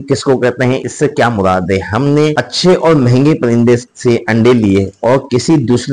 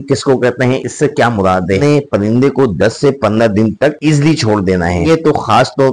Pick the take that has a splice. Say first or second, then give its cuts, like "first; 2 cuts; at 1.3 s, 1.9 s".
second; 2 cuts; at 1.8 s, 5.1 s